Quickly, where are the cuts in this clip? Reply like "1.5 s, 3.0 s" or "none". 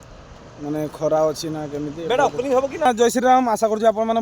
2.9 s